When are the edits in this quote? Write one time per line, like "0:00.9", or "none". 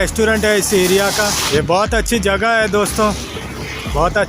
0:01.4